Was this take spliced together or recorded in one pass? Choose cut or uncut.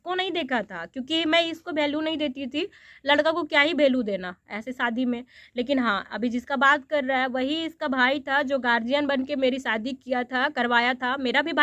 uncut